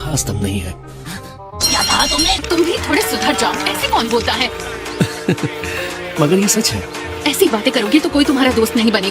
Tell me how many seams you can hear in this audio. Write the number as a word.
one